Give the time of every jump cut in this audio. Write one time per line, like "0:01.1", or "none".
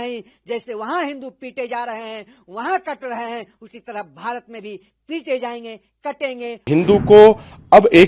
0:06.7